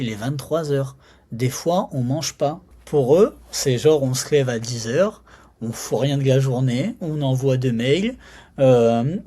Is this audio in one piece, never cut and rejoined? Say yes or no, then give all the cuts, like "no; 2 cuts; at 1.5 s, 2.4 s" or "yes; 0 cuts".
no; 1 cut; at 2.7 s